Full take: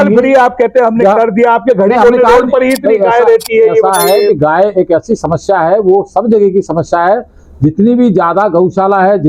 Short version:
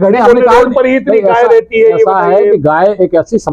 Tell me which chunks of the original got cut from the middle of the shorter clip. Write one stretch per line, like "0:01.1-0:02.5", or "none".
none